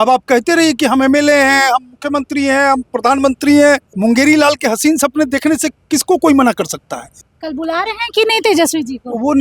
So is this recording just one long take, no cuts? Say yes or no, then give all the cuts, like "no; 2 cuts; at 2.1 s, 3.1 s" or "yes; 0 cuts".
no; 2 cuts; at 3.9 s, 7.2 s